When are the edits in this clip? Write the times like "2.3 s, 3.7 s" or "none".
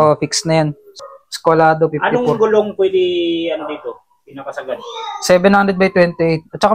1.0 s